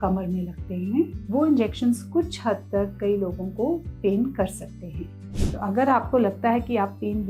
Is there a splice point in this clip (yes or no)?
yes